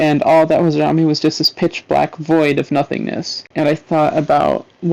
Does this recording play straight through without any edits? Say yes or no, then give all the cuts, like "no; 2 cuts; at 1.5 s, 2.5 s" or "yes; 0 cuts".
no; 1 cut; at 3.4 s